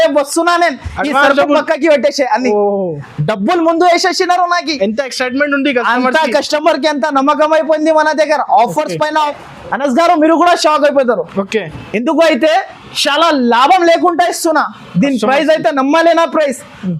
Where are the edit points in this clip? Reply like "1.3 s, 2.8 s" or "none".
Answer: 9.3 s

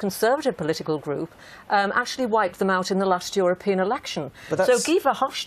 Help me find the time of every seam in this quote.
3.3 s

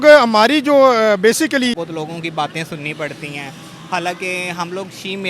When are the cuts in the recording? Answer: 1.8 s

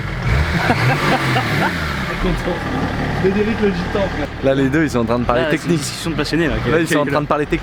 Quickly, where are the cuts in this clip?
none

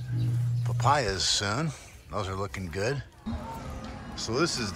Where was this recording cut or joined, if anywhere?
3.1 s

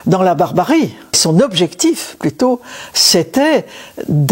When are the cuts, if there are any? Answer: 1.2 s

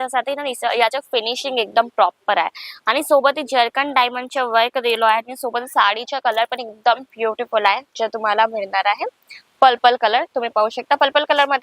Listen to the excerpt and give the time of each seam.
none

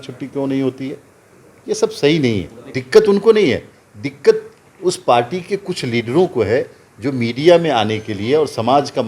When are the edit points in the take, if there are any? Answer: 2.7 s

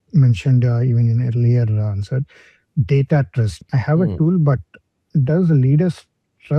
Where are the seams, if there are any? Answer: 3.5 s

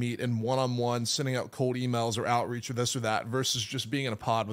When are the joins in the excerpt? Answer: none

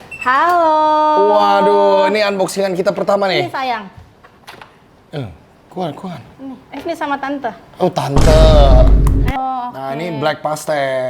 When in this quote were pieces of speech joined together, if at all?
9.3 s

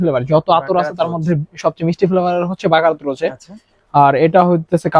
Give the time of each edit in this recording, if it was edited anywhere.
none

